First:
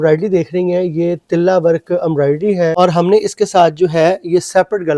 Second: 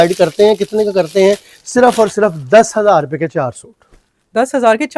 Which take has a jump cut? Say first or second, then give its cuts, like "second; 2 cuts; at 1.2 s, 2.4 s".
first; 1 cut; at 2.7 s